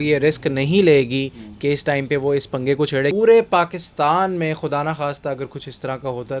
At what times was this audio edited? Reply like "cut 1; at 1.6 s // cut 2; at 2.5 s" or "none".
cut 1; at 3.1 s